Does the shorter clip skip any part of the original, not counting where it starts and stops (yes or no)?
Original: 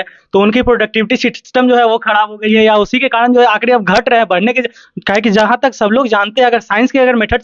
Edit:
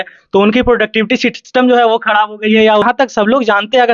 yes